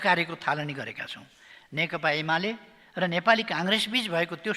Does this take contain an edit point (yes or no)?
no